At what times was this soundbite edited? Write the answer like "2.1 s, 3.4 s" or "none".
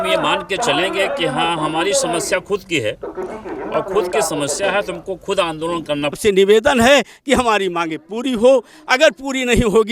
6.2 s